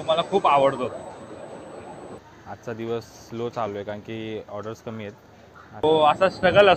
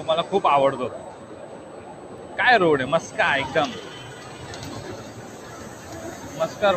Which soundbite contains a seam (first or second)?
first